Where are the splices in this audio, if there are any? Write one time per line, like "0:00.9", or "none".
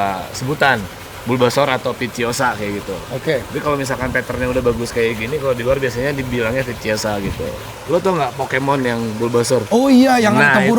0:07.7